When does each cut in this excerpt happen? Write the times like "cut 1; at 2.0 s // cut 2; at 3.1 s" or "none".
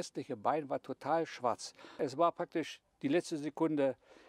cut 1; at 2.0 s